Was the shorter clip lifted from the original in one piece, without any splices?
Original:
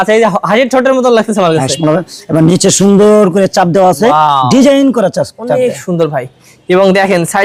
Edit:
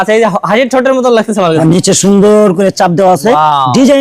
no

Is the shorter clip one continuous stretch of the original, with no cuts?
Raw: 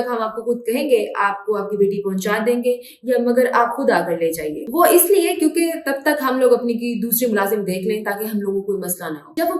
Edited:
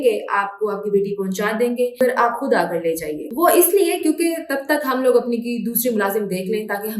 no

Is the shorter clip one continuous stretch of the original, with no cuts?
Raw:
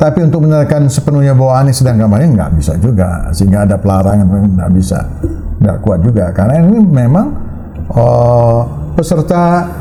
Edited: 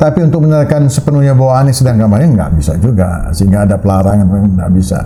yes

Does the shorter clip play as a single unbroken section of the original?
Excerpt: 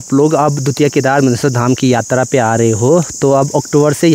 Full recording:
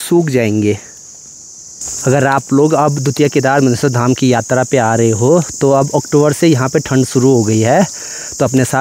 yes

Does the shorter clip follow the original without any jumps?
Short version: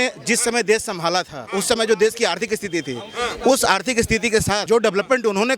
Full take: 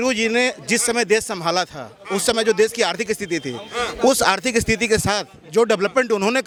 no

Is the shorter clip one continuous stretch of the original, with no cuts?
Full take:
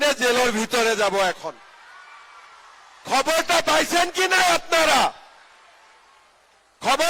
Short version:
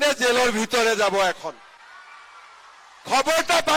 yes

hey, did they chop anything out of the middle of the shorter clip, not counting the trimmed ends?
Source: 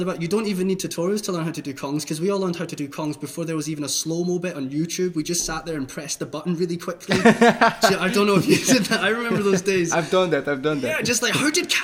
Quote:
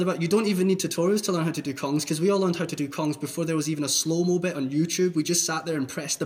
no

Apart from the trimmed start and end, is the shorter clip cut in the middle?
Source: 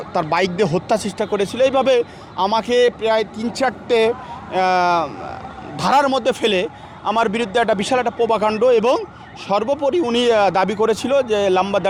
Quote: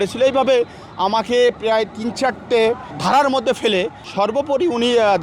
yes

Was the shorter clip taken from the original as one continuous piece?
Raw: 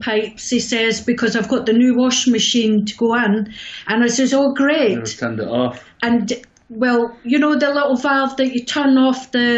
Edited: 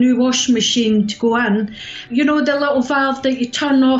no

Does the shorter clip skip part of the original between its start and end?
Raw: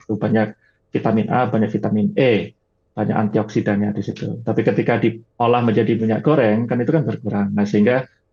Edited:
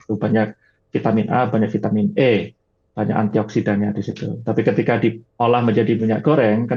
no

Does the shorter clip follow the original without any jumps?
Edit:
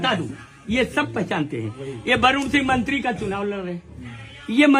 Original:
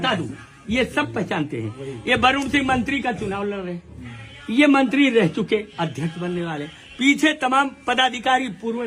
yes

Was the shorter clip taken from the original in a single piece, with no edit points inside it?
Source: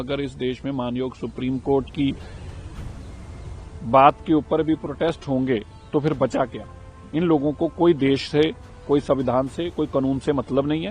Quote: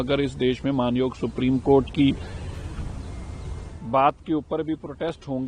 yes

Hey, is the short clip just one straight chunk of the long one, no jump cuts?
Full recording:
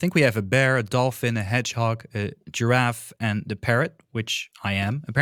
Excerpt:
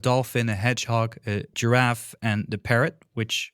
no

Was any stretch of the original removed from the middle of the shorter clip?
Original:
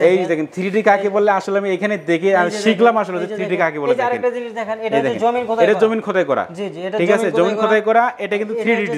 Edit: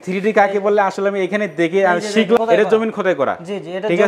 yes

